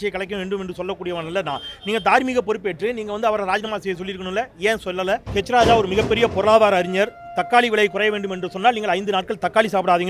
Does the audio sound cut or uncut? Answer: cut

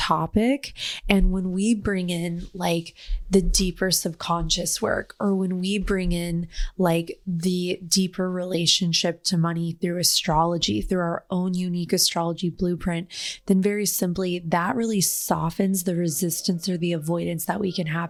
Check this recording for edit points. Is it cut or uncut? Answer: uncut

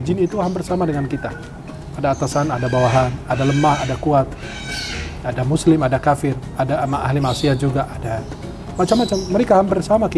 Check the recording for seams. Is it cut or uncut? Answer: uncut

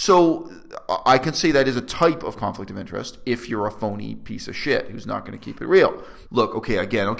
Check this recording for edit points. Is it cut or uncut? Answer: cut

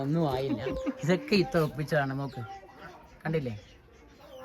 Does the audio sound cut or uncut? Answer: uncut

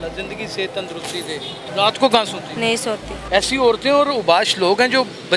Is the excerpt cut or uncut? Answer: cut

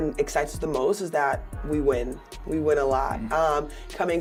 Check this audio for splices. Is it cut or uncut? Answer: uncut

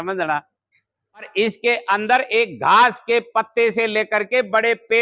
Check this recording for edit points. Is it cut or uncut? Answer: cut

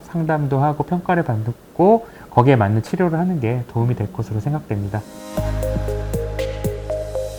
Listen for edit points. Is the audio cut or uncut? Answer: uncut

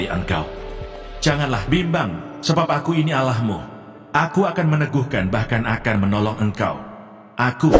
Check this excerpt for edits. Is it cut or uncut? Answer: uncut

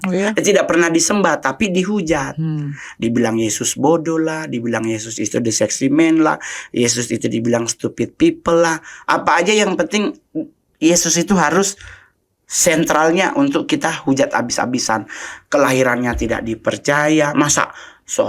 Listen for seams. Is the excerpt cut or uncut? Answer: uncut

